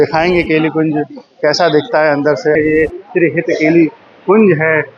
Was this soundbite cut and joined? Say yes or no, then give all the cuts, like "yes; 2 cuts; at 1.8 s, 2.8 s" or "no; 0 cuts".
yes; 1 cut; at 2.5 s